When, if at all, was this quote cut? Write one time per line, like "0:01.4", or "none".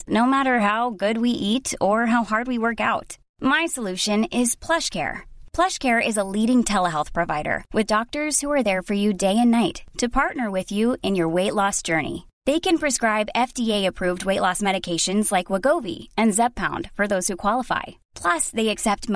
none